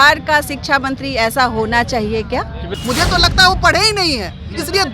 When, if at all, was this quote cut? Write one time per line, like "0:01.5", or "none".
0:02.6